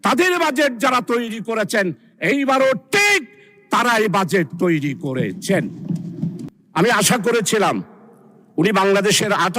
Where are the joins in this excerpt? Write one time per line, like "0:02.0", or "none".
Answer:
0:06.4